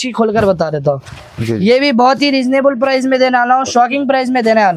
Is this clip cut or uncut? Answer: uncut